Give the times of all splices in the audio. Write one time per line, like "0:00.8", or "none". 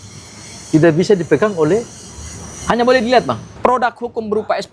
0:03.5